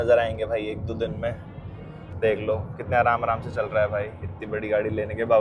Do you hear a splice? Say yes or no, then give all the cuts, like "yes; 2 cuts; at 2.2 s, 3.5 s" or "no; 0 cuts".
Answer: no; 0 cuts